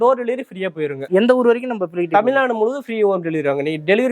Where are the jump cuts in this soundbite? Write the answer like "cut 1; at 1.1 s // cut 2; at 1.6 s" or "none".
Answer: cut 1; at 1.0 s